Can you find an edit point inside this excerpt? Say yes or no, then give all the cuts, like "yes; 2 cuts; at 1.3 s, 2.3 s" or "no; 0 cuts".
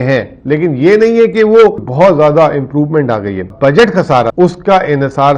yes; 3 cuts; at 1.9 s, 3.5 s, 4.3 s